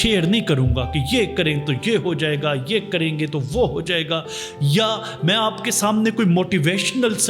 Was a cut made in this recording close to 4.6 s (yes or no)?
no